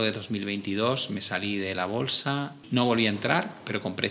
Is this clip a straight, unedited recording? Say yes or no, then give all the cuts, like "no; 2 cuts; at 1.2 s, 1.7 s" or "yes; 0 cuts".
no; 1 cut; at 2.6 s